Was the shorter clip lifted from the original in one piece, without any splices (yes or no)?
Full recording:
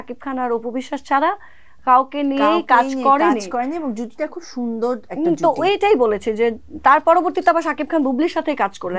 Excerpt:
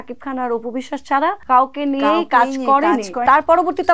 no